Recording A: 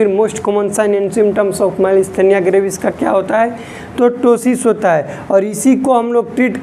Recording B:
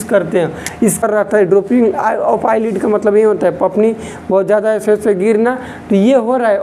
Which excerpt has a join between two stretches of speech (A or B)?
B